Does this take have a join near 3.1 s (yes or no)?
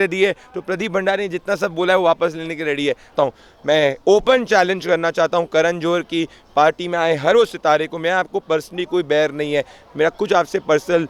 yes